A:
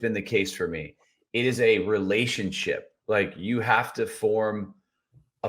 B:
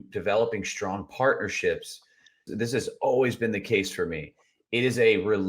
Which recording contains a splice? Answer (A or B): B